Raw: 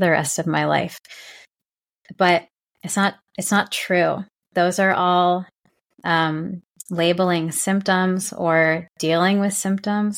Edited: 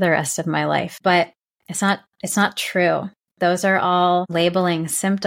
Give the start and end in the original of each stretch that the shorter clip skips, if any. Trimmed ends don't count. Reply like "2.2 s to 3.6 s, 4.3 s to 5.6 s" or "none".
0.9 s to 2.1 s, 5.4 s to 6.9 s